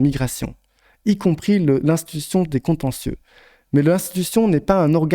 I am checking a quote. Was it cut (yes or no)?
no